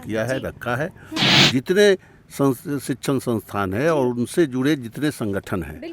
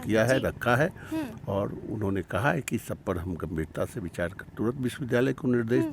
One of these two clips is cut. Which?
first; 1 cut; at 1.4 s

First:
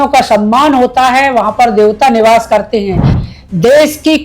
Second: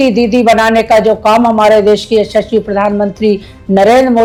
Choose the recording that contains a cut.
first; 1 cut; at 3.2 s

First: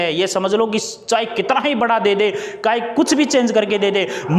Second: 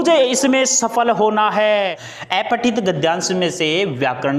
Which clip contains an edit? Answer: second; 1 cut; at 2.1 s

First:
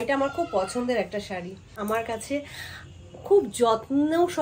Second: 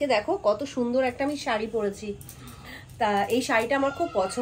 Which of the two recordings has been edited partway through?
first; 1 cut; at 1.8 s

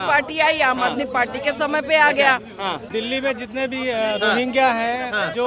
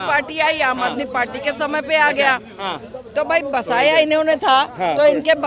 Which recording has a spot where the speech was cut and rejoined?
first; 1 cut; at 2.8 s

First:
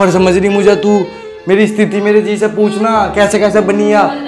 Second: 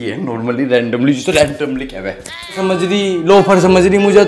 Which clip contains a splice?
second; 1 cut; at 2.6 s

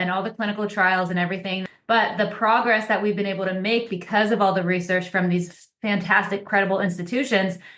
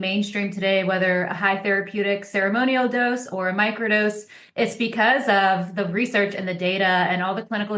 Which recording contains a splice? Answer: first; 1 cut; at 1.6 s

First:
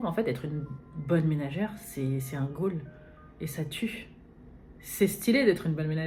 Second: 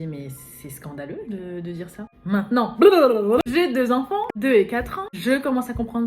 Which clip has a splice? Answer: second; 4 cuts; at 2.1 s, 3.4 s, 4.3 s, 5.0 s

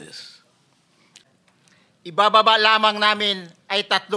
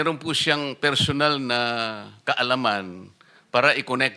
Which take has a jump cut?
first; 1 cut; at 1.2 s

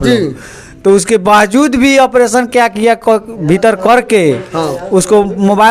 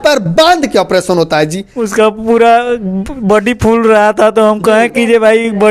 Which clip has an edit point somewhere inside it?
second; 1 cut; at 1.7 s

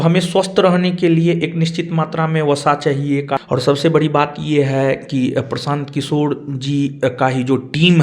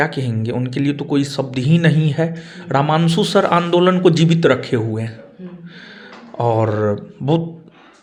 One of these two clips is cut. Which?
first; 1 cut; at 3.4 s

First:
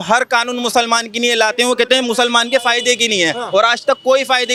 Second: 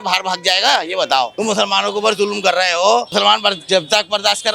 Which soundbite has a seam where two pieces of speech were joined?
second; 2 cuts; at 1.3 s, 3.1 s

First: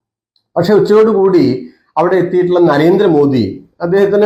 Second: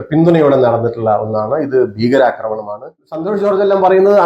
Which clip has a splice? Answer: second; 1 cut; at 3.0 s

